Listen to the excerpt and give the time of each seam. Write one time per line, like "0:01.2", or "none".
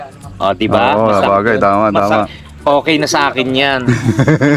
none